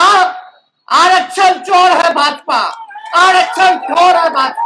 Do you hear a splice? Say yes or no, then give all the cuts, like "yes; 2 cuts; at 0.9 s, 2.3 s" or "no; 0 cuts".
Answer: no; 0 cuts